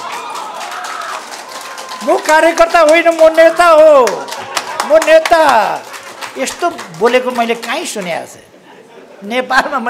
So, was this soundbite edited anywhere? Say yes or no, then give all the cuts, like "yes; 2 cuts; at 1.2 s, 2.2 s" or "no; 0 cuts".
no; 0 cuts